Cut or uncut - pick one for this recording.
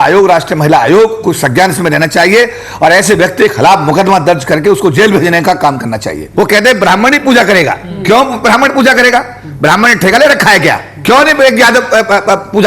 cut